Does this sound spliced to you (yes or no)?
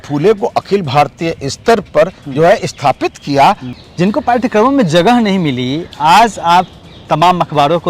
yes